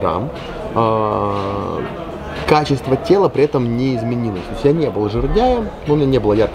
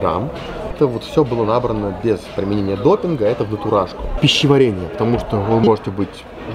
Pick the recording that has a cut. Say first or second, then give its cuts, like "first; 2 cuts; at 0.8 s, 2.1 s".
second; 2 cuts; at 0.7 s, 4.2 s